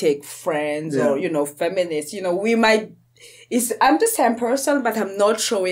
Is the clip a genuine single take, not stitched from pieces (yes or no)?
yes